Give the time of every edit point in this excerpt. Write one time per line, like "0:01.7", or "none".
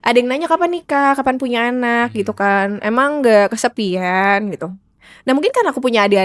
none